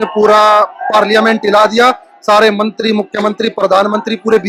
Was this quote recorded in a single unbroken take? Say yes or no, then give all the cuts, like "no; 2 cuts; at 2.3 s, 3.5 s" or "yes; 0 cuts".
yes; 0 cuts